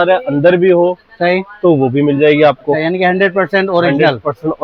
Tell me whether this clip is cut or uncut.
uncut